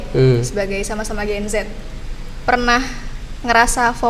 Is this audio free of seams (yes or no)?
yes